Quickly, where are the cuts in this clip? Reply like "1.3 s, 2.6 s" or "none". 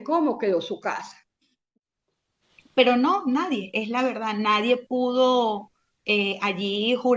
1.6 s